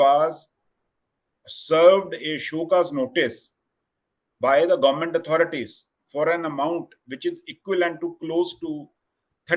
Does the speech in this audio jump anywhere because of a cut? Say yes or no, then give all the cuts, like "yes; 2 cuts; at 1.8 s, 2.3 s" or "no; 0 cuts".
no; 0 cuts